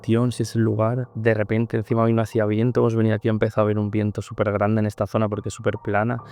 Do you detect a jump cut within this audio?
no; 0 cuts

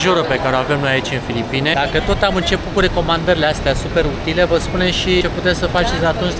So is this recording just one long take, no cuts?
no; 2 cuts; at 1.7 s, 5.2 s

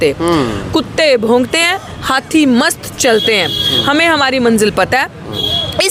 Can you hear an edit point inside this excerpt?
no; 0 cuts

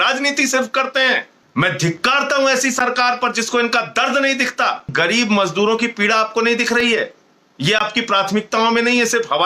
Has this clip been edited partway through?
yes; 2 cuts; at 1.4 s, 4.9 s

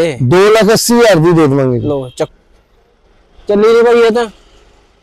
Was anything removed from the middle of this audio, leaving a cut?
yes; 1 cut; at 2.3 s

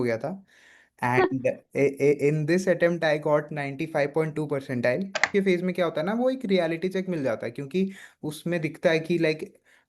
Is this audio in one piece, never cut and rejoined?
no; 1 cut; at 5.2 s

